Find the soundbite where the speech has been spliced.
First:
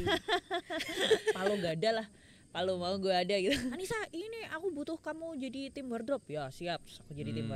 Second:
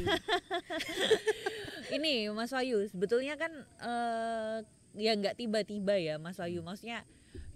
first; 2 cuts; at 1.4 s, 3.8 s

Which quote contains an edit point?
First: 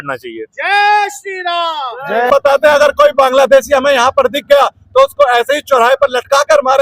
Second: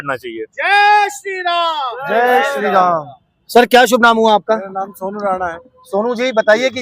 first; 1 cut; at 2.3 s

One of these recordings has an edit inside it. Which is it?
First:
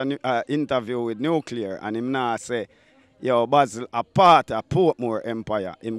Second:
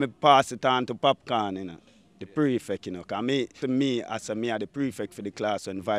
second; 1 cut; at 3.6 s

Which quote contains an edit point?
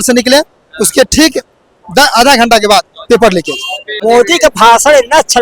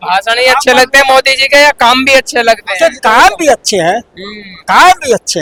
first; 1 cut; at 3.9 s

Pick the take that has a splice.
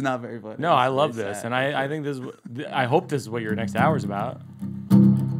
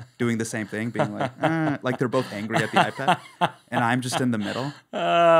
first; 1 cut; at 4.5 s

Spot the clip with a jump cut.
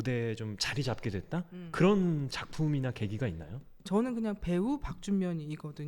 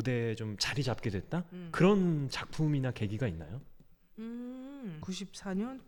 first; 1 cut; at 3.8 s

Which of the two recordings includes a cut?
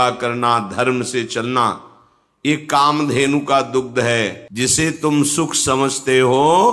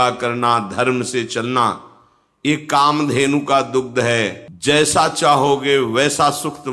first; 1 cut; at 4.4 s

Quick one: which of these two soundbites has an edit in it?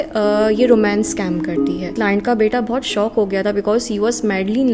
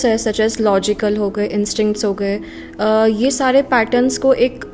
first; 1 cut; at 1.9 s

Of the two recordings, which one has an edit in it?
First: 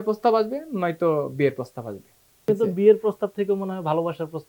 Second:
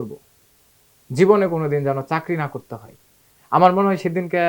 first; 1 cut; at 2.5 s

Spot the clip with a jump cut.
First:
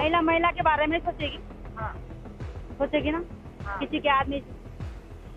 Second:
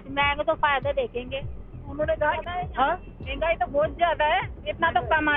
second; 1 cut; at 2.4 s

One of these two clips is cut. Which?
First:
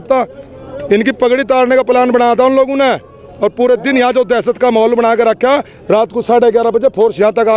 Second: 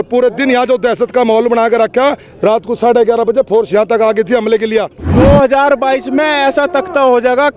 second; 1 cut; at 5.1 s

